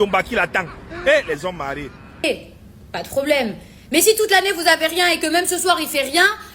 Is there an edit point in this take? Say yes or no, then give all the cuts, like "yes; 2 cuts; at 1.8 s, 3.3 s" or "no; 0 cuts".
yes; 1 cut; at 2.2 s